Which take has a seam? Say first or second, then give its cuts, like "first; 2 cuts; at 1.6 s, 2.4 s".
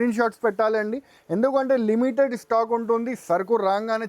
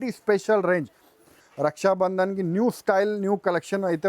second; 1 cut; at 1.4 s